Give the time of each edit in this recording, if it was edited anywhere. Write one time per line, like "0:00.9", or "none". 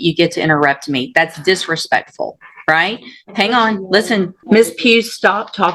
0:04.4